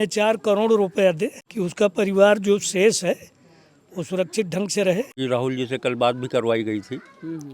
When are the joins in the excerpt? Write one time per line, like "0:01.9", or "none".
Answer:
0:01.4
0:05.1